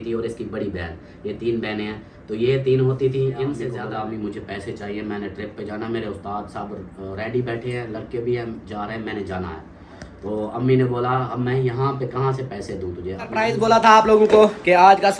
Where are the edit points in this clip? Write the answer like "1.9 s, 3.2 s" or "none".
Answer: 3.7 s, 13.4 s

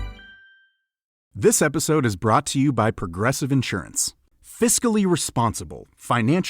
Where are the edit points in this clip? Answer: 1.2 s

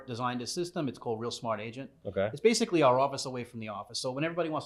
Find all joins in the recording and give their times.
none

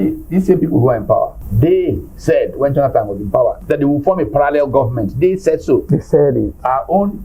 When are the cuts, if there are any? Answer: 1.4 s, 3.6 s

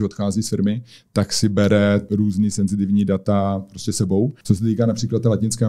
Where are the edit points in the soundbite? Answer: 2.1 s, 4.4 s

